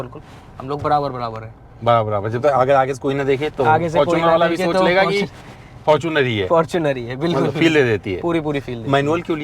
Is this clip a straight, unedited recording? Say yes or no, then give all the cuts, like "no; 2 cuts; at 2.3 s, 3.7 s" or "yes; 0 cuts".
yes; 0 cuts